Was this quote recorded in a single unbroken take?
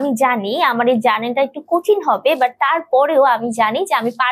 yes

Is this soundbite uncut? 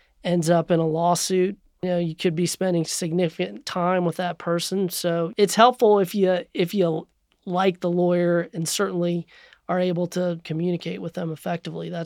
no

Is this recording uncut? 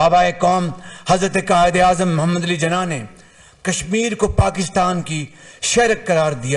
yes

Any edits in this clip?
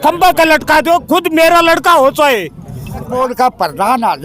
yes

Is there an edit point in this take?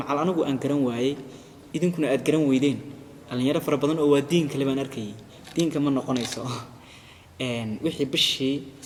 no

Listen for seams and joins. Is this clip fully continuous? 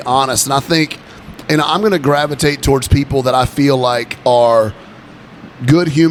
yes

